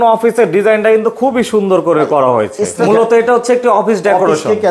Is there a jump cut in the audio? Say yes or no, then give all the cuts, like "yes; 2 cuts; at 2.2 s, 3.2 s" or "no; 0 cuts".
yes; 1 cut; at 2.8 s